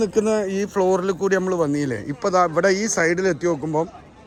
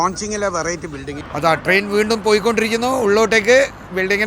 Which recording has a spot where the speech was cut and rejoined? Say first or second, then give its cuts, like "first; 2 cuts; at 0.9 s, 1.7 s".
second; 1 cut; at 1.3 s